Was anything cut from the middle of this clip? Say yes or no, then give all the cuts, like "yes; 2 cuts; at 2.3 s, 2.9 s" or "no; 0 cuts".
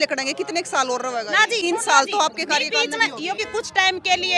yes; 2 cuts; at 1.6 s, 3.4 s